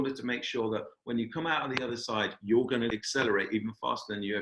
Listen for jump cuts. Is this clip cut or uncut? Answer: cut